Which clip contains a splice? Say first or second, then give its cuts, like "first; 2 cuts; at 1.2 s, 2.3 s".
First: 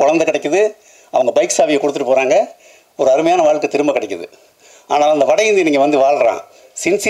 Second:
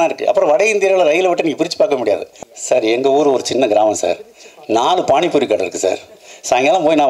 second; 1 cut; at 2.4 s